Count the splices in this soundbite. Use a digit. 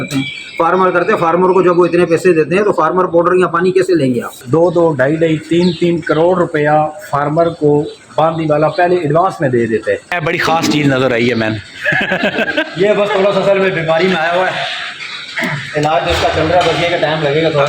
2